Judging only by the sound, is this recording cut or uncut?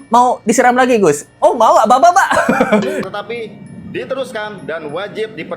cut